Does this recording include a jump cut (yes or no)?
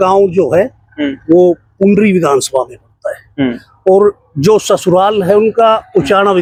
no